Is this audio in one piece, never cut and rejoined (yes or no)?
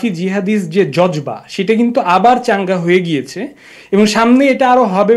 yes